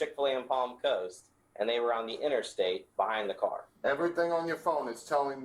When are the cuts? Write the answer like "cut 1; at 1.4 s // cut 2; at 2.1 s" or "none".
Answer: cut 1; at 3.6 s